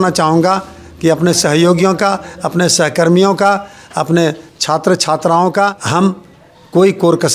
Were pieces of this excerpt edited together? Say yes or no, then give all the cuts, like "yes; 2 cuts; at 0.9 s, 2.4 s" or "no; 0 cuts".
yes; 1 cut; at 5.8 s